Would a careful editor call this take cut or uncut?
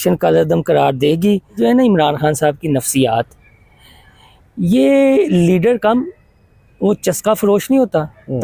cut